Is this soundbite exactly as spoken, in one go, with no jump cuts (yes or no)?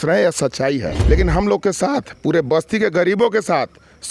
no